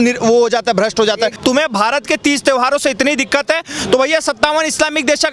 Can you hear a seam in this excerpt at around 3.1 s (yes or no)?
no